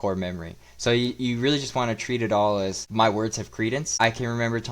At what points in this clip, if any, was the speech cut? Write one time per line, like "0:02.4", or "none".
0:02.8
0:04.0